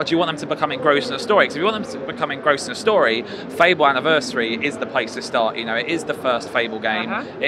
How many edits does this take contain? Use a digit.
0